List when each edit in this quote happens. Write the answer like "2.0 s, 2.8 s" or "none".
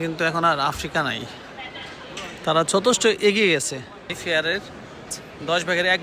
4.1 s